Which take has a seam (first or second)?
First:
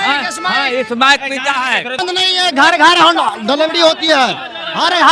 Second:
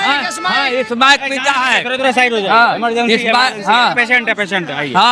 first